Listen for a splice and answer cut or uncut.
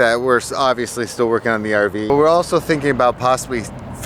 cut